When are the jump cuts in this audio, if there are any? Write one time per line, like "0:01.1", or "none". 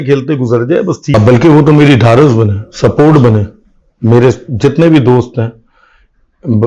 0:01.1